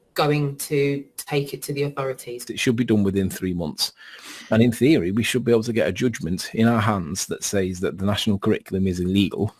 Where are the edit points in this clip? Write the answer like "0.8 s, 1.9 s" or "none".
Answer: 2.4 s